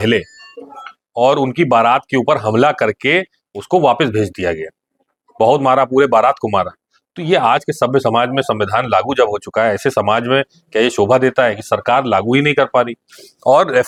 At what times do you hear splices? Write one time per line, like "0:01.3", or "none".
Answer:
none